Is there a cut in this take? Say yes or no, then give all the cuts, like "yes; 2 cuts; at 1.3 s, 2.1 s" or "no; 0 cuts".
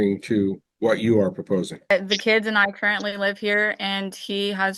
yes; 1 cut; at 1.9 s